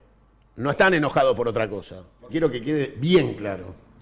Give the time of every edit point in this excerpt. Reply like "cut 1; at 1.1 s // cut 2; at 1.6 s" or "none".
cut 1; at 2.2 s